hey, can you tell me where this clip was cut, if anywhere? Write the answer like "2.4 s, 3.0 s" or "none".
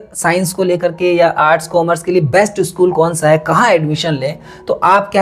none